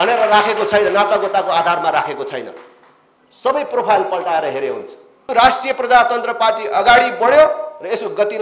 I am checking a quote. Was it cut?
yes; 1 cut; at 5.3 s

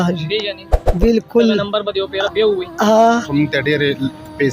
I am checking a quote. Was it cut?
yes; 1 cut; at 3.3 s

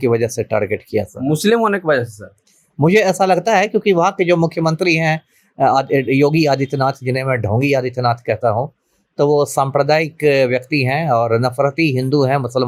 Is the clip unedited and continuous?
yes; 0 cuts

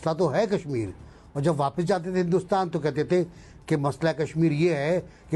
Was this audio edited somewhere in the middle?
no; 0 cuts

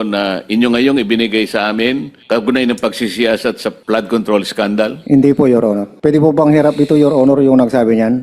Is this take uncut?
no; 4 cuts; at 2.1 s, 3.7 s, 5.0 s, 5.9 s

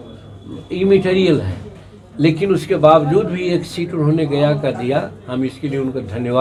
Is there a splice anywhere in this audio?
no; 0 cuts

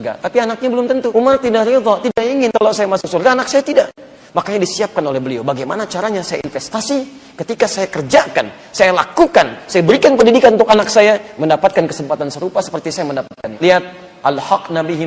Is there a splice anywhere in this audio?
yes; 2 cuts; at 1.1 s, 13.5 s

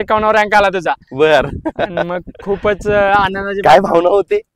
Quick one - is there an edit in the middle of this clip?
no; 0 cuts

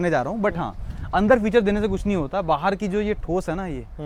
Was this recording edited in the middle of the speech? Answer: no; 0 cuts

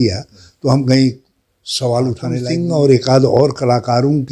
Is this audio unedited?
no; 1 cut; at 2.4 s

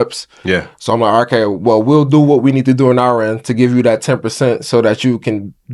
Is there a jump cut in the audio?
no; 0 cuts

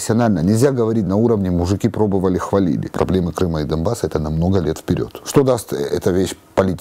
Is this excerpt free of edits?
no; 2 cuts; at 2.9 s, 5.2 s

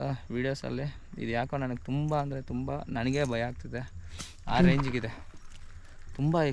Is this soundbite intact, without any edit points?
yes; 0 cuts

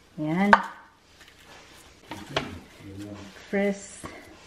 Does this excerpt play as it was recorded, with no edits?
yes; 0 cuts

